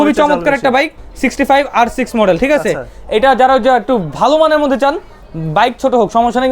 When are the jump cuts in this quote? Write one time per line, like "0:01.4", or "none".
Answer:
none